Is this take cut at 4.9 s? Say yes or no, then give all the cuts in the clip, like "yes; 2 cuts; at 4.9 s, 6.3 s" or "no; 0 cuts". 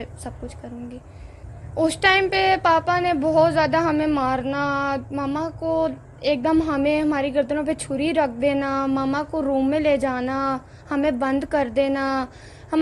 no; 1 cut; at 1.5 s